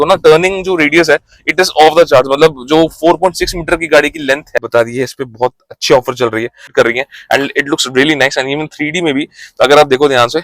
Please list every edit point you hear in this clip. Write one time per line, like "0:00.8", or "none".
0:04.6
0:06.7